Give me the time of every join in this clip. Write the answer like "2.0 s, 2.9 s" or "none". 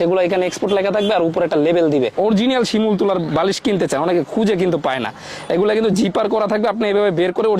2.1 s